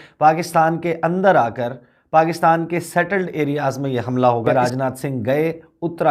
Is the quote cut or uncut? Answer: uncut